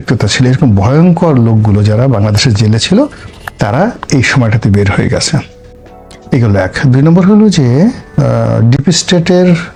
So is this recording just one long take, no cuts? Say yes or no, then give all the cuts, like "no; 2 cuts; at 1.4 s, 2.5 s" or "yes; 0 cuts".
yes; 0 cuts